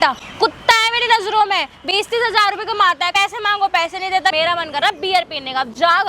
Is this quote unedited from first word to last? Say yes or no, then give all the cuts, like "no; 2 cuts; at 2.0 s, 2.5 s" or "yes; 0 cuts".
no; 2 cuts; at 3.1 s, 4.3 s